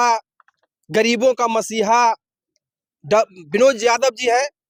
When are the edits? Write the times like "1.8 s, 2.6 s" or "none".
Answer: none